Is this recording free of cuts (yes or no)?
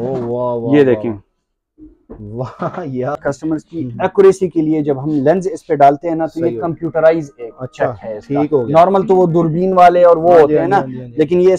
no